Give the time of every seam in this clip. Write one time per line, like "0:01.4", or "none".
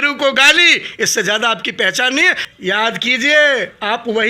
0:02.4